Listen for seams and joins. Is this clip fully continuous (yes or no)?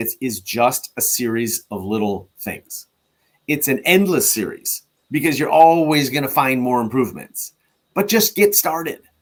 yes